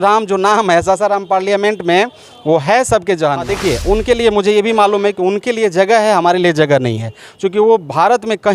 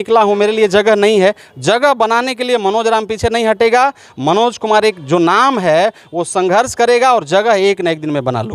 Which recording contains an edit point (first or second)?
first